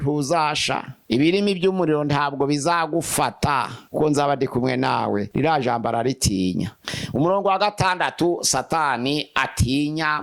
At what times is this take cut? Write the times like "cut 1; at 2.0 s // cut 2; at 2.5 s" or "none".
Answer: cut 1; at 3.8 s // cut 2; at 5.3 s // cut 3; at 6.9 s